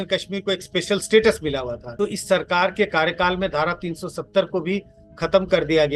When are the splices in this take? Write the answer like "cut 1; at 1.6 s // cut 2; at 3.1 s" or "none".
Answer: cut 1; at 1.8 s